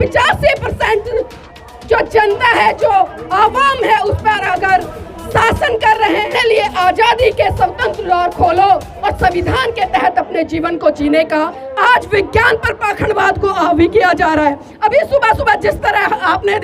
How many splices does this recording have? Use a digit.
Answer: 2